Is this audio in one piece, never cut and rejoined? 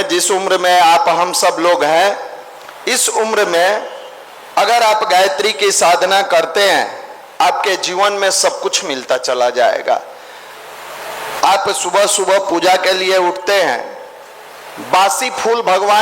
yes; 0 cuts

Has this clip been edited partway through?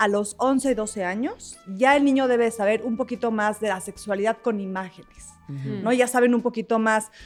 no; 0 cuts

